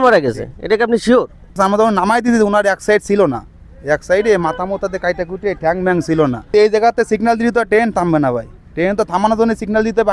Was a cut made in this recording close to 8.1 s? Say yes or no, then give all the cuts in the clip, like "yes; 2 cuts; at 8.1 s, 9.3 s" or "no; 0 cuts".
no; 2 cuts; at 1.5 s, 6.5 s